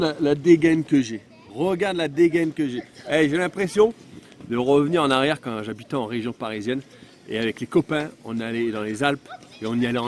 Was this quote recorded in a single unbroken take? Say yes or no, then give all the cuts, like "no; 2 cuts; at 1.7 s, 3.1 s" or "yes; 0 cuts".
yes; 0 cuts